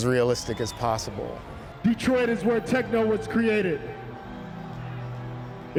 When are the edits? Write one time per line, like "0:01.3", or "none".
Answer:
none

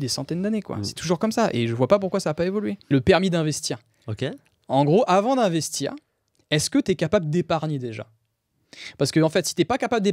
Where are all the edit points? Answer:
0:02.9

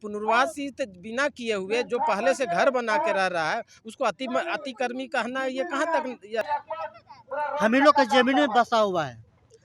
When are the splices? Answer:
0:06.4

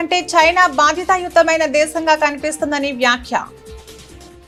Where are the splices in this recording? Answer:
none

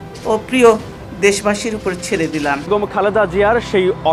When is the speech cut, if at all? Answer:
none

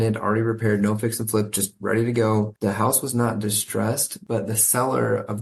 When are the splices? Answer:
0:02.5
0:04.1

